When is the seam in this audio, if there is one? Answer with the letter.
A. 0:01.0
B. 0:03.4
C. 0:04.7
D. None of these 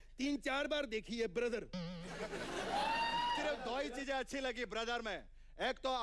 B